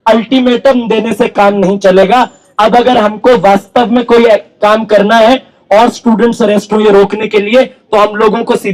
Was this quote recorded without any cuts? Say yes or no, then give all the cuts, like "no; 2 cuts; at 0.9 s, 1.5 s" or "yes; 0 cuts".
yes; 0 cuts